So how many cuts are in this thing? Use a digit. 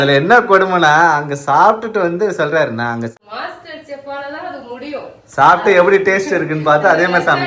1